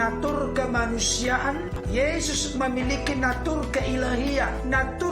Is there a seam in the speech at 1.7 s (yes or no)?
yes